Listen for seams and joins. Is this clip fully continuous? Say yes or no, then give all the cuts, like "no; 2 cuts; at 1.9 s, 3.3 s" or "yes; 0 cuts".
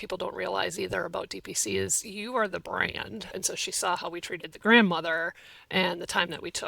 no; 1 cut; at 3.3 s